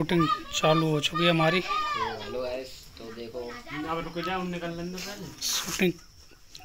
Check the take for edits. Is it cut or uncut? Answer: uncut